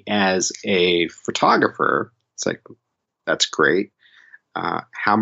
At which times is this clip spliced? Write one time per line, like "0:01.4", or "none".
none

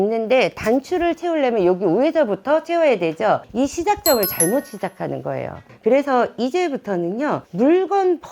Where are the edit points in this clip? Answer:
none

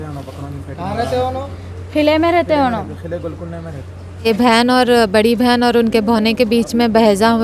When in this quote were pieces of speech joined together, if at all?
0:04.3

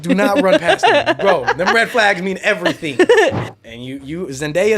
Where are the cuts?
0:03.5

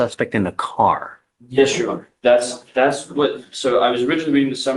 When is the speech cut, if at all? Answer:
none

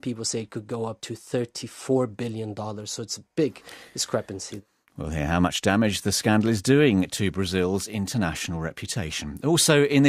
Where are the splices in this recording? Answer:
0:01.1
0:04.4

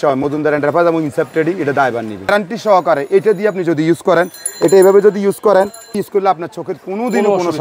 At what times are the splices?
0:02.3
0:06.0

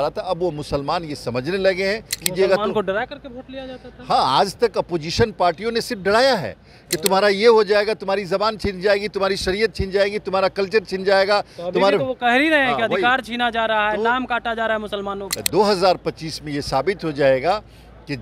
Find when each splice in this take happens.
0:02.2
0:15.3

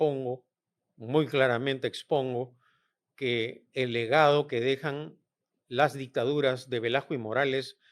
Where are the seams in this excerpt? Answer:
none

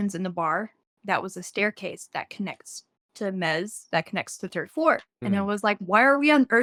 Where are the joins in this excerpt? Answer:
none

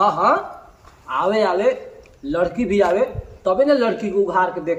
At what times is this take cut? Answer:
none

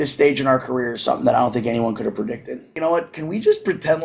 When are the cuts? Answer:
0:02.7

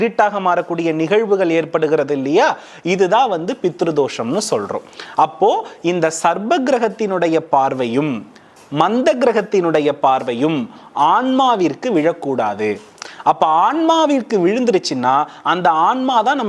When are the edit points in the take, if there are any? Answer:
none

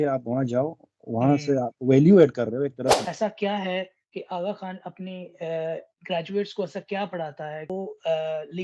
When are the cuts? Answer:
0:03.0
0:07.7

